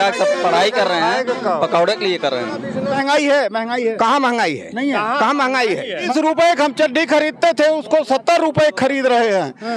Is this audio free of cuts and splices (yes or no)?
no